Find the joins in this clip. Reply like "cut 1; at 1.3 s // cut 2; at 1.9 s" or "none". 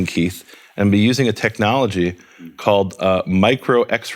none